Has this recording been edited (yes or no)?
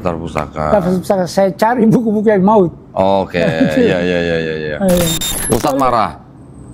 yes